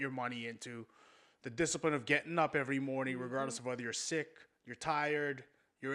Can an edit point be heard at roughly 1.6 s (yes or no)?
no